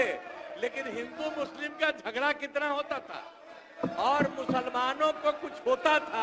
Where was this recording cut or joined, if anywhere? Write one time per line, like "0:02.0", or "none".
none